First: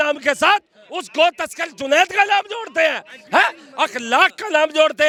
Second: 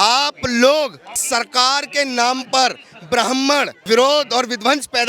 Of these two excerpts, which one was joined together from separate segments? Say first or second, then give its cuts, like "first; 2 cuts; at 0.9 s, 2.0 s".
second; 2 cuts; at 1.2 s, 3.8 s